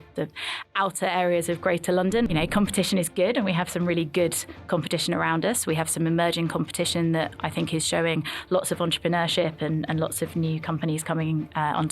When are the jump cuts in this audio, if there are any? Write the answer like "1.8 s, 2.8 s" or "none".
2.3 s